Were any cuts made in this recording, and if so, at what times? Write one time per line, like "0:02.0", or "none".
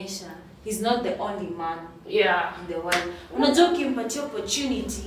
none